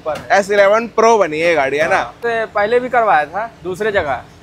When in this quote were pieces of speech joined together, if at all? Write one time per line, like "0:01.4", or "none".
0:02.2